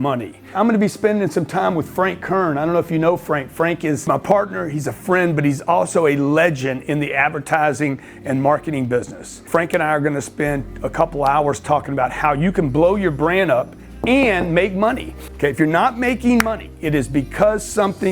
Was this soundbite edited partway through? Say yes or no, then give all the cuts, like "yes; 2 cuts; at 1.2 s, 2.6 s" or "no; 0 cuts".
yes; 1 cut; at 15.1 s